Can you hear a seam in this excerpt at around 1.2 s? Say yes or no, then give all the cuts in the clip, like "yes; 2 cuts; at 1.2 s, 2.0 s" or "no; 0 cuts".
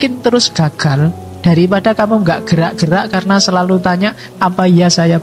no; 0 cuts